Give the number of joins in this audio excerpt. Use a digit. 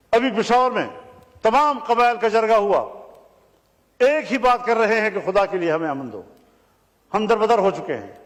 0